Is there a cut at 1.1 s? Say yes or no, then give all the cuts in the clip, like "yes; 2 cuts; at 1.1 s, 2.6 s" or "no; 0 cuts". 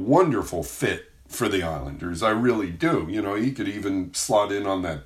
no; 0 cuts